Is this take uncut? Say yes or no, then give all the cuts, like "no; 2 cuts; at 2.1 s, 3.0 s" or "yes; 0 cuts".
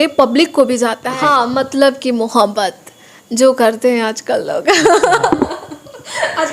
no; 1 cut; at 1.1 s